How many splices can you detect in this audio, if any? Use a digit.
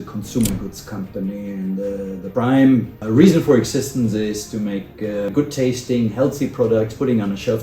3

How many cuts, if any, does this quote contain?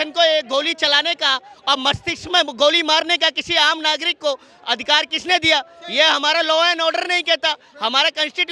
0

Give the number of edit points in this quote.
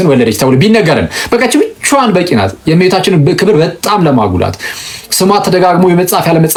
0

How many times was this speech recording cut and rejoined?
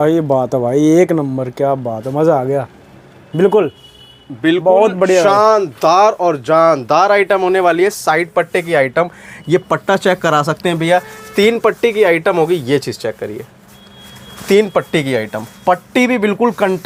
0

